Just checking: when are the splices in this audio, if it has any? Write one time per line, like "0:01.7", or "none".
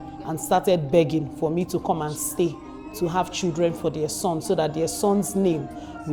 none

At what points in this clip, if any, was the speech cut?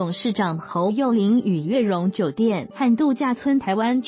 none

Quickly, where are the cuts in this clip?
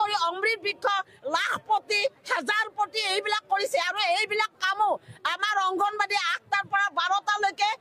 none

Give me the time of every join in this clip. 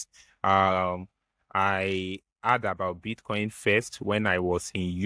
none

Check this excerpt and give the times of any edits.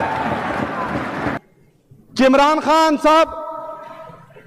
0:01.4

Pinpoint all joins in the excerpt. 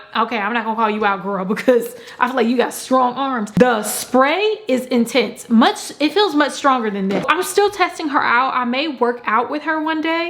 none

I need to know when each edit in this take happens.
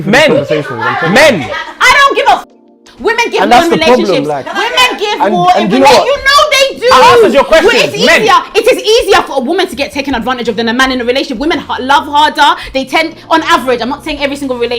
0:04.3

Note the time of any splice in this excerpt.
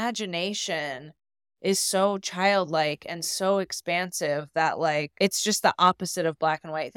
0:05.1

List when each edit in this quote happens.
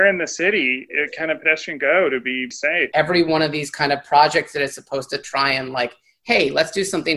0:02.9

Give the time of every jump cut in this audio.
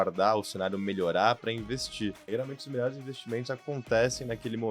0:02.2

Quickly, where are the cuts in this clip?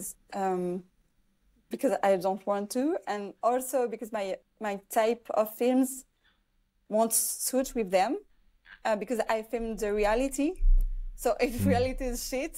none

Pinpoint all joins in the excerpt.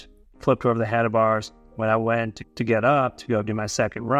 0:02.1

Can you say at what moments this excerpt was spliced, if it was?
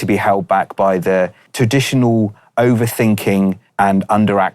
0:01.4
0:03.6

